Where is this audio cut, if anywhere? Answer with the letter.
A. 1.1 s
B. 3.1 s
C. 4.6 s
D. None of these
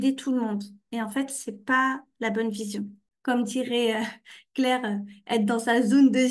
B